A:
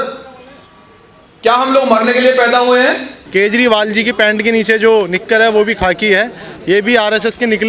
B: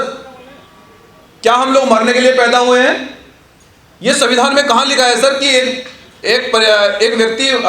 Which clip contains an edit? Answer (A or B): A